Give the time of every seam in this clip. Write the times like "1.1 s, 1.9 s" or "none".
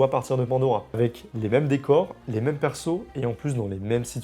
1.0 s

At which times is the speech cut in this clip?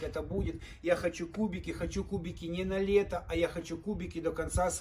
none

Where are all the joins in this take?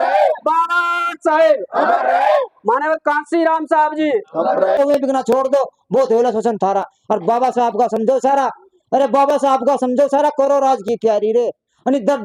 4.8 s

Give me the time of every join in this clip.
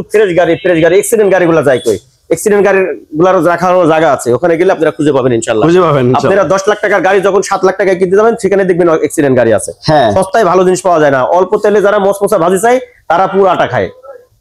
none

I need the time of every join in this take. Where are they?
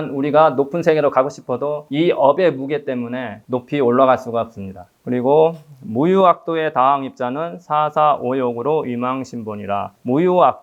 none

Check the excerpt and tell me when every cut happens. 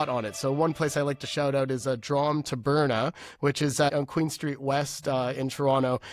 3.9 s

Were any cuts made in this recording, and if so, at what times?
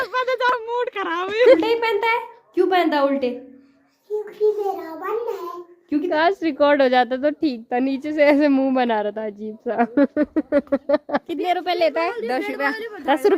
1.6 s, 6.1 s, 11.3 s

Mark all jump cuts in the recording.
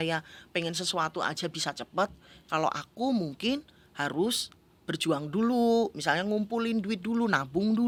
none

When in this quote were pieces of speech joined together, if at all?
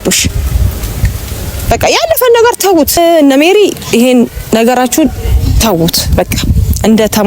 3.0 s

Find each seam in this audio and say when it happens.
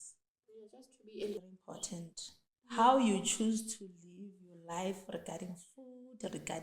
1.4 s

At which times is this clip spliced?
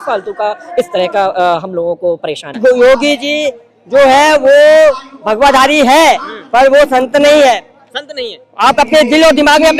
2.6 s

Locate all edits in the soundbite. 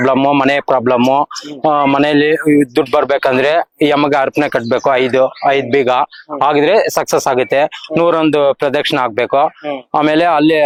none

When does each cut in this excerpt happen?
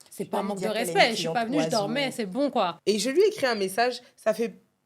2.8 s

